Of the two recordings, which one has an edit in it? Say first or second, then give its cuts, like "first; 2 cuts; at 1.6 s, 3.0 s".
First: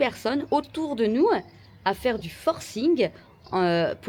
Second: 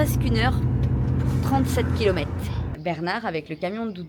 second; 1 cut; at 2.7 s